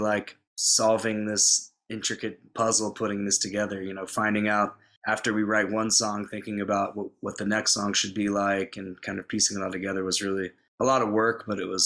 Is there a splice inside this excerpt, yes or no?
no